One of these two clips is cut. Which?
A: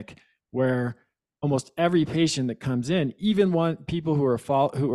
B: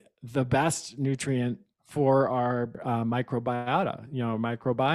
B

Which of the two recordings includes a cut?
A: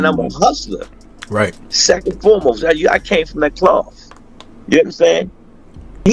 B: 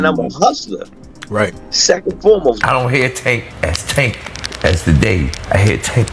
B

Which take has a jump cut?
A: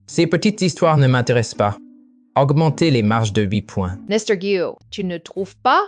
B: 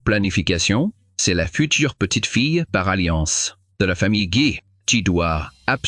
A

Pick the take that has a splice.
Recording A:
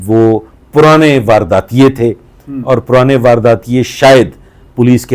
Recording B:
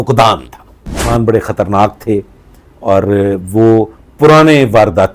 B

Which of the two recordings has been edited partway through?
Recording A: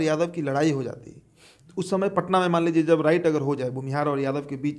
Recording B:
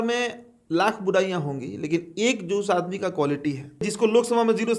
B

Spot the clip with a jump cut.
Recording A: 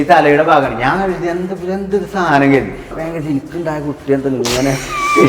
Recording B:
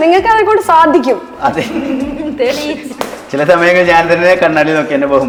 A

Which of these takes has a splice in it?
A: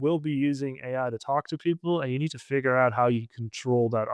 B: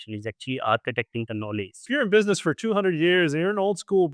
B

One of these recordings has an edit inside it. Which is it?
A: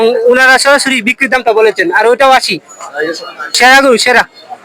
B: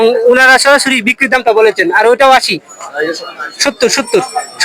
A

